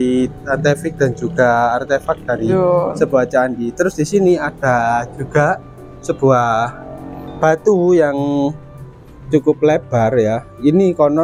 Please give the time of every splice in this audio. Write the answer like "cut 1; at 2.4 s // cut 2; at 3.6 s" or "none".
none

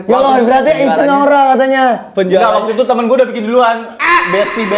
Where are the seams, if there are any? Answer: none

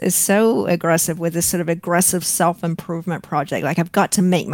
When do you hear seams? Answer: none

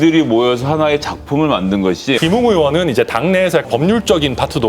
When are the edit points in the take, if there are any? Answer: cut 1; at 2.2 s // cut 2; at 3.7 s

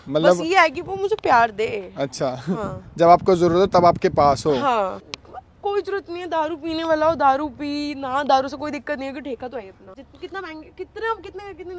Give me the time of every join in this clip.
cut 1; at 5.1 s // cut 2; at 9.9 s

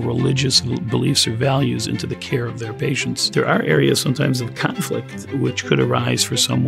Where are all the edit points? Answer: cut 1; at 5.2 s

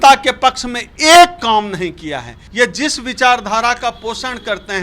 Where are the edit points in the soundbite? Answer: cut 1; at 2.4 s

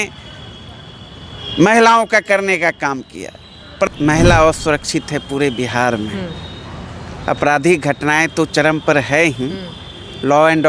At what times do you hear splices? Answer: cut 1; at 3.9 s

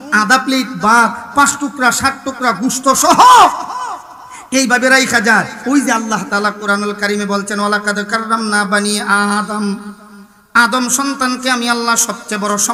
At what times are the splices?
none

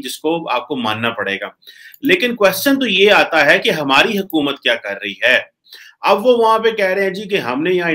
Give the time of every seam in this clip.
none

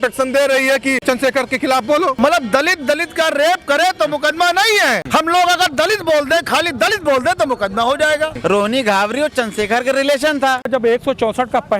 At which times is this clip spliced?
cut 1; at 1.0 s // cut 2; at 2.2 s // cut 3; at 5.0 s // cut 4; at 8.3 s // cut 5; at 10.7 s

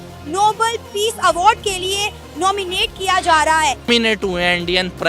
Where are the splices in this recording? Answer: cut 1; at 3.9 s

